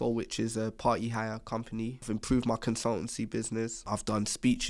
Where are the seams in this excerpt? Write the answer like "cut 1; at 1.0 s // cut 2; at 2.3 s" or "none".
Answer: cut 1; at 2.0 s // cut 2; at 3.9 s